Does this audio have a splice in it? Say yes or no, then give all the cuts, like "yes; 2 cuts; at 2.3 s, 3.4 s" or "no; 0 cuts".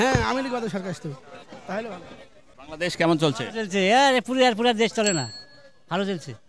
no; 0 cuts